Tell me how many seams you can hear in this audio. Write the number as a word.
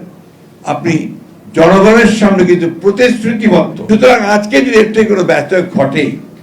one